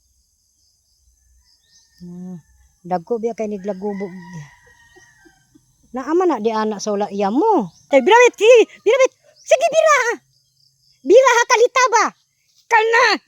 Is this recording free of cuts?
no; 1 cut; at 7.8 s

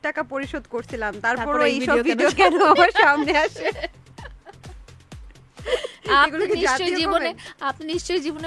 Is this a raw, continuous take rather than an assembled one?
yes; 0 cuts

